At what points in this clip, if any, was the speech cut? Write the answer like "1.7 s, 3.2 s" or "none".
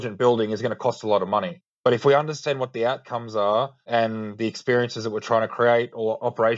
2.0 s